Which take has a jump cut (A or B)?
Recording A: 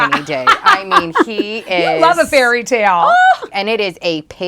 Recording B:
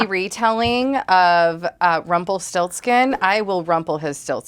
A